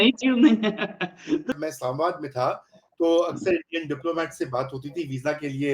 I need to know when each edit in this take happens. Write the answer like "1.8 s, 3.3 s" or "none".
1.6 s